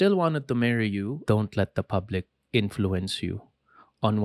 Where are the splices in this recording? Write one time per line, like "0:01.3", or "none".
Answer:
0:01.2